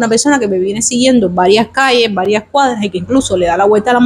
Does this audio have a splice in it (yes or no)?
no